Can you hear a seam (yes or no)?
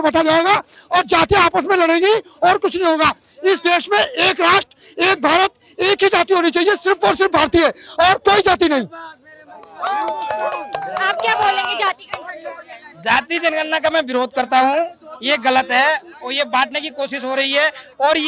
no